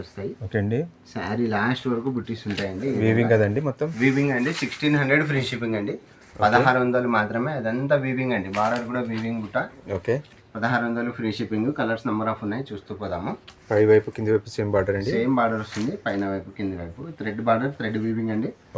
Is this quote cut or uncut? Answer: uncut